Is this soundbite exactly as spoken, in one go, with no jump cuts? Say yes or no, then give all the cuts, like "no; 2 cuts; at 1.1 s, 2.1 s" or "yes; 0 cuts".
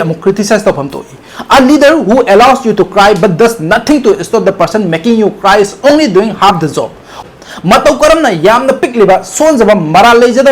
no; 1 cut; at 7.2 s